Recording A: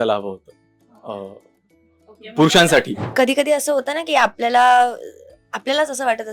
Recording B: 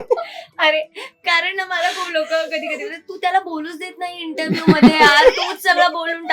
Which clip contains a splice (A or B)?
A